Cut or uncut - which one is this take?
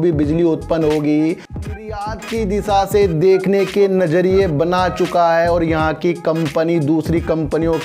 cut